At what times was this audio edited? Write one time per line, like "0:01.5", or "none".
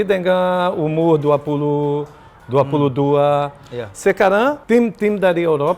0:04.6